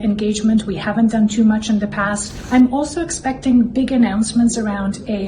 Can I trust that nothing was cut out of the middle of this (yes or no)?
no